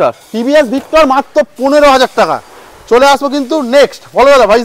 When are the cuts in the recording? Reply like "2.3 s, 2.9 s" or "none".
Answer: none